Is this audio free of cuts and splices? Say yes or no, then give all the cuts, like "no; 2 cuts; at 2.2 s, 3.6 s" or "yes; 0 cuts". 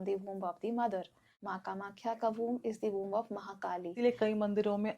no; 2 cuts; at 1.3 s, 3.9 s